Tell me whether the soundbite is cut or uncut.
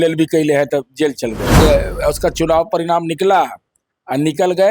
cut